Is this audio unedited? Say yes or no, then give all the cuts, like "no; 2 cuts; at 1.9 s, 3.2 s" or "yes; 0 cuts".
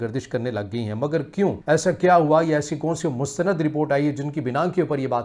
no; 1 cut; at 1.6 s